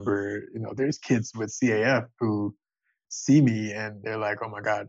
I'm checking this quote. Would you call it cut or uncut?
uncut